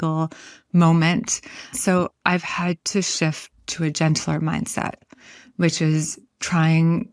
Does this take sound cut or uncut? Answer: cut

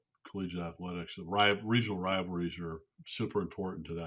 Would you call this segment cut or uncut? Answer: cut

